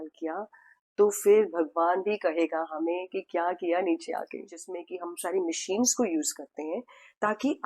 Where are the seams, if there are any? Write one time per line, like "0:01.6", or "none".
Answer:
0:05.0